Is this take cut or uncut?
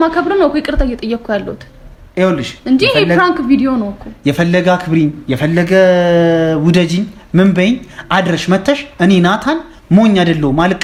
uncut